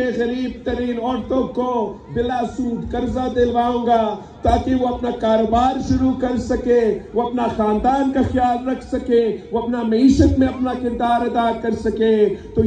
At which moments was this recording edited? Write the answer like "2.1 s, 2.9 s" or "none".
none